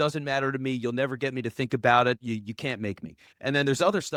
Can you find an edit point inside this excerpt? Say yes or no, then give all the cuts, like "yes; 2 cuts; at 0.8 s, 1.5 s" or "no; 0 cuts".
no; 0 cuts